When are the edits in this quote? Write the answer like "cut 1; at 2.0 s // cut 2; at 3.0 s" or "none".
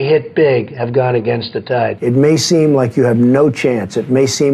cut 1; at 2.0 s